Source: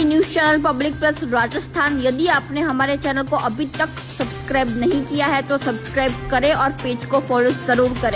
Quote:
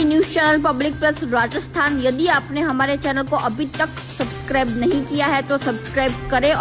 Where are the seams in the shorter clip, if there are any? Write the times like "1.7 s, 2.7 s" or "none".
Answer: none